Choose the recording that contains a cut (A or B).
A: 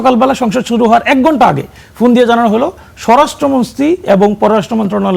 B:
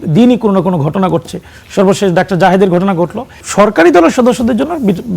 B